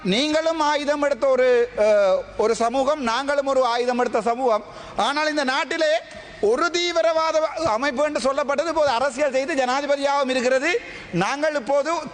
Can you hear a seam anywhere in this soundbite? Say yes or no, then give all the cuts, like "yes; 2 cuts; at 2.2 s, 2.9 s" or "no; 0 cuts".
no; 0 cuts